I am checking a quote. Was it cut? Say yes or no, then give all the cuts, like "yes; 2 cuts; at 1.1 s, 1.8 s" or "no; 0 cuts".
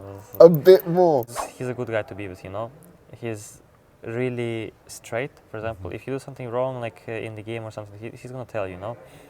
yes; 1 cut; at 1.3 s